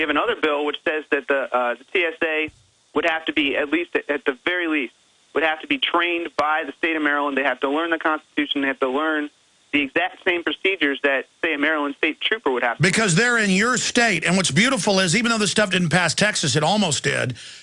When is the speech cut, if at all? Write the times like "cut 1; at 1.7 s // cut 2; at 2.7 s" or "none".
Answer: none

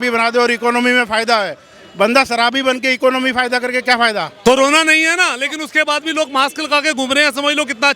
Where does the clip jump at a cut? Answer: cut 1; at 4.3 s

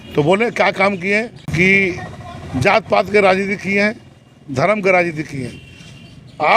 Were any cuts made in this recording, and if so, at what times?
cut 1; at 1.4 s

